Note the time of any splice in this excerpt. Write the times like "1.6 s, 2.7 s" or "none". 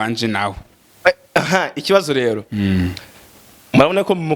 none